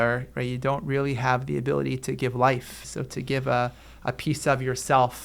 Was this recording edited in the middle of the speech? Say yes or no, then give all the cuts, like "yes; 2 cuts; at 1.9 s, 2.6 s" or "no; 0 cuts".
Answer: yes; 1 cut; at 2.9 s